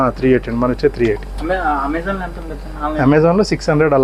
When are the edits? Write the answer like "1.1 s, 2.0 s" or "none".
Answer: none

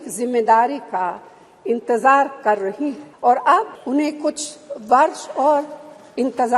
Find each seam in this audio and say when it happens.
3.0 s, 3.8 s

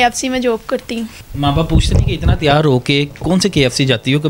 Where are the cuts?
1.2 s

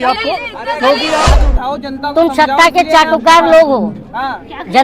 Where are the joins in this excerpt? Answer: 1.2 s

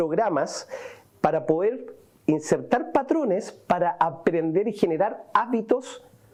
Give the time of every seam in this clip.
none

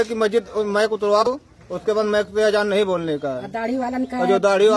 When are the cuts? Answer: 1.3 s

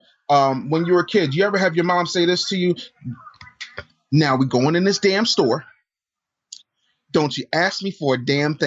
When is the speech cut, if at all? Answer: none

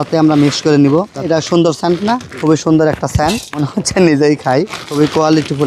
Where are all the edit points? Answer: 1.2 s

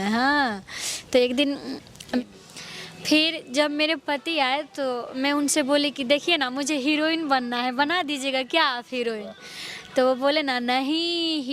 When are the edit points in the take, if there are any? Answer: 2.2 s

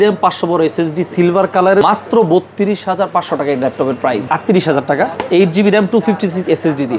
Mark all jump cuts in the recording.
1.8 s, 4.3 s, 5.2 s

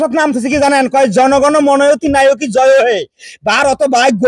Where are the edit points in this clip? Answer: none

